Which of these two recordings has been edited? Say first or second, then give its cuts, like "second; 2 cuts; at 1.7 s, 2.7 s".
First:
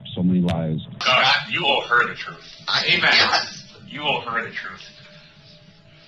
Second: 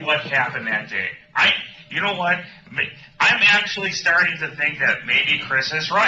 first; 1 cut; at 0.9 s